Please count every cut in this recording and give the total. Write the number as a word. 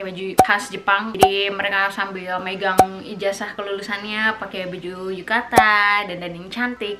zero